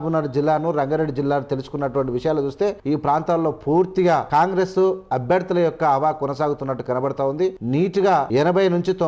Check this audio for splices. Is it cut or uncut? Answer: cut